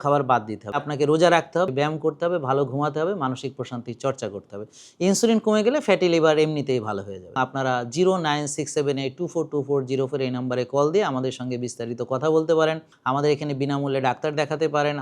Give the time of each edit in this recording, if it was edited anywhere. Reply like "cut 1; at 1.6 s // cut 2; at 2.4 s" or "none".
cut 1; at 0.8 s // cut 2; at 1.7 s // cut 3; at 7.3 s // cut 4; at 12.9 s